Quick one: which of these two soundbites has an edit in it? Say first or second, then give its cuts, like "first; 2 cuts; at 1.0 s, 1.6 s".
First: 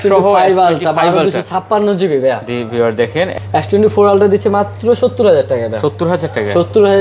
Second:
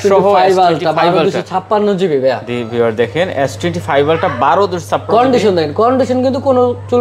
first; 1 cut; at 3.3 s